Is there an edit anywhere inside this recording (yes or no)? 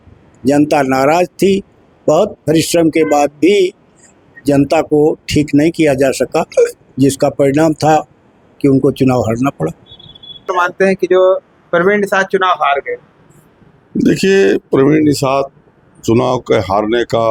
no